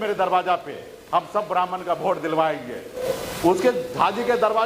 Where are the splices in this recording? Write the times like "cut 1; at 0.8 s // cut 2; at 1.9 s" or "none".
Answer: cut 1; at 3.0 s